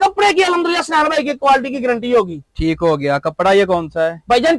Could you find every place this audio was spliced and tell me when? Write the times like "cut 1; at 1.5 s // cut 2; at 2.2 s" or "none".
none